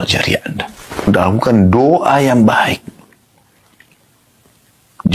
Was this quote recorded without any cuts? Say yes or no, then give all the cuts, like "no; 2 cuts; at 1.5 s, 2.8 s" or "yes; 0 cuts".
no; 1 cut; at 1.0 s